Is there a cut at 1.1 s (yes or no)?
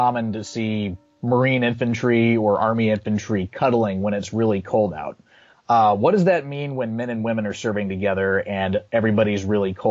yes